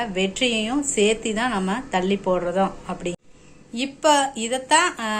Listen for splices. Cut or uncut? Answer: cut